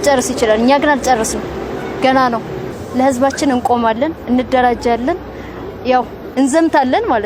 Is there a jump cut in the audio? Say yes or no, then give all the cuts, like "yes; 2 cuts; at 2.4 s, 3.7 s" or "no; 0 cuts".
yes; 1 cut; at 2.8 s